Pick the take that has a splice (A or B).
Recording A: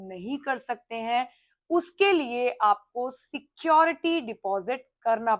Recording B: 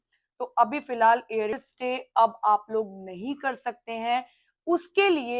B